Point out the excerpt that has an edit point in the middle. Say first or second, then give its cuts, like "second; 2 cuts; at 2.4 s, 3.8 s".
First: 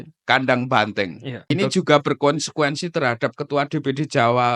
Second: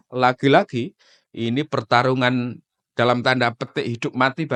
first; 1 cut; at 1.5 s